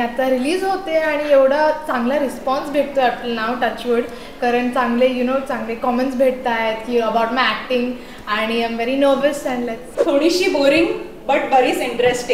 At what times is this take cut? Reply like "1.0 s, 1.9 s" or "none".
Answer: 9.9 s